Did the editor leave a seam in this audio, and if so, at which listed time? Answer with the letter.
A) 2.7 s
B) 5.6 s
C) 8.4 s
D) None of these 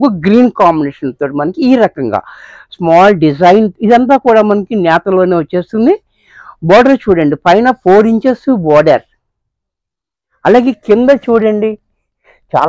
D